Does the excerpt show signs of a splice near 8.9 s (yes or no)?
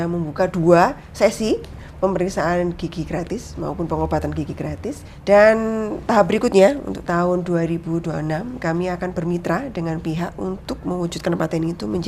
no